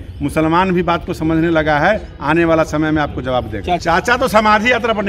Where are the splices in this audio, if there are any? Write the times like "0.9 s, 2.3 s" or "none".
3.8 s